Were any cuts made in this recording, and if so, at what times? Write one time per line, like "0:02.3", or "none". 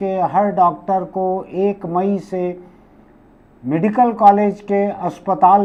none

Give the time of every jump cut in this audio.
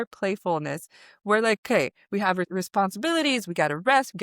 0:02.5

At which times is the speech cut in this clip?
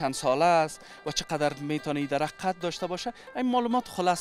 none

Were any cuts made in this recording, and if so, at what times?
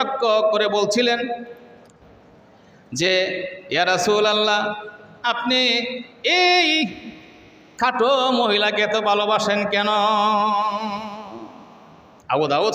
none

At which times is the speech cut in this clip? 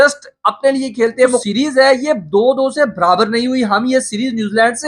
0:01.4

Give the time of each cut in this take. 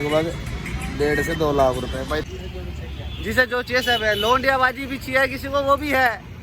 0:02.2

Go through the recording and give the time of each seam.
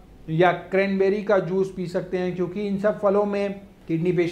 none

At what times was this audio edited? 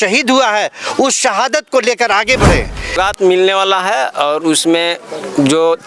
0:03.0

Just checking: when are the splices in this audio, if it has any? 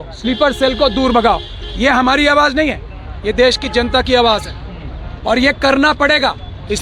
none

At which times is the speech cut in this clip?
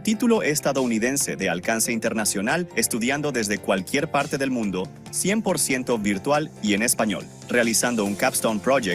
none

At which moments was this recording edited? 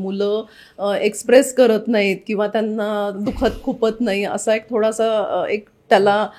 none

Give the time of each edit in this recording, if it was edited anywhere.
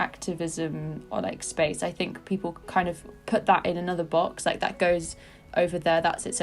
0:03.1

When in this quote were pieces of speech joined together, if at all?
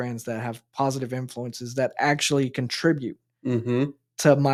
none

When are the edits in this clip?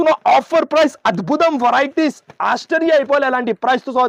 none

